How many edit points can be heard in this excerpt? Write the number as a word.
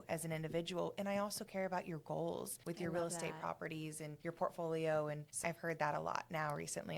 one